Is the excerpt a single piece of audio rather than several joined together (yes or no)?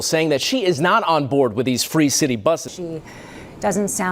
no